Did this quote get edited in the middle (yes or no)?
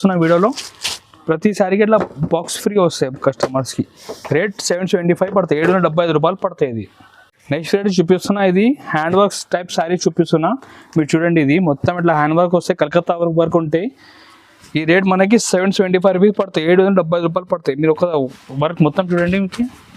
no